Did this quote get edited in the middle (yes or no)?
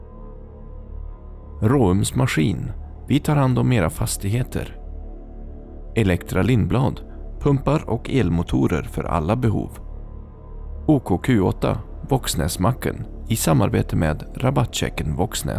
yes